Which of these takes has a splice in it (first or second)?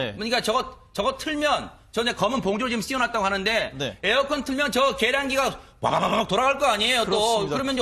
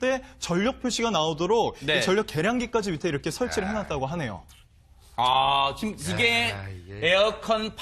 second